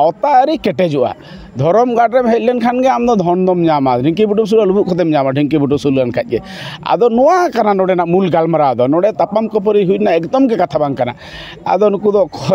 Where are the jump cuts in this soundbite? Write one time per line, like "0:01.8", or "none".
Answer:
none

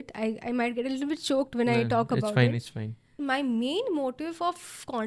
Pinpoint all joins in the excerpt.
0:03.1

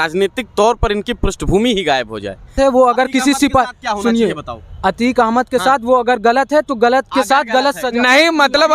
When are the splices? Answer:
0:02.5

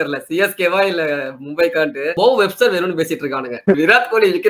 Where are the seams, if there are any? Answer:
0:02.1
0:03.8

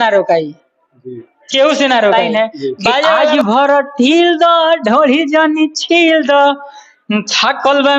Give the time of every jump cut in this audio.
0:03.4

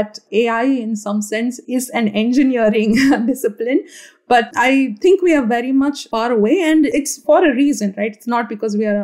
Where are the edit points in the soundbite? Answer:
0:01.6
0:04.5
0:06.1
0:07.0

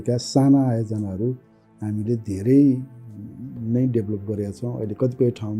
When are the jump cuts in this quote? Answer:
none

